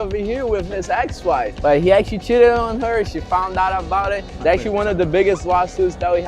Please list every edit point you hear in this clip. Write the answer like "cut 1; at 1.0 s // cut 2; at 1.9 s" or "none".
cut 1; at 1.5 s // cut 2; at 4.3 s